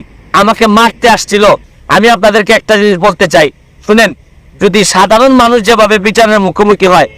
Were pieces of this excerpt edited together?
yes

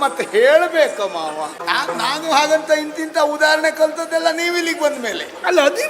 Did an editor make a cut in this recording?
yes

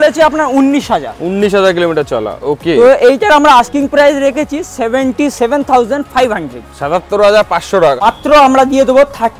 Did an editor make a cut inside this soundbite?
yes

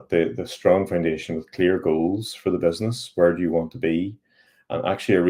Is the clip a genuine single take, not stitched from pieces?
yes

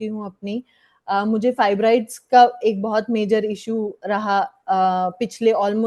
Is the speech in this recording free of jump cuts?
yes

